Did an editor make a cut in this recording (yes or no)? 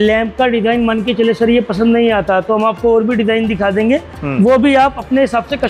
no